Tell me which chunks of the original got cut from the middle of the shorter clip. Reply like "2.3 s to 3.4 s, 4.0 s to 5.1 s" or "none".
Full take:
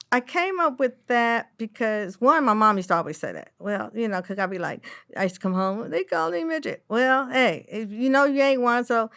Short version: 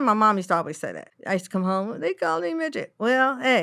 3.5 s to 5.0 s